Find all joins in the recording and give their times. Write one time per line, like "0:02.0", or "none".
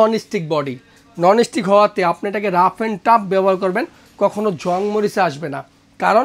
none